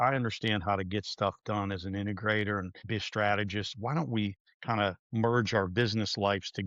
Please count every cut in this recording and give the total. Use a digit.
2